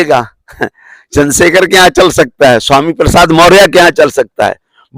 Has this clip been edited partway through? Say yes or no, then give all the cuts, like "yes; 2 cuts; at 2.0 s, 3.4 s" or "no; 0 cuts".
no; 0 cuts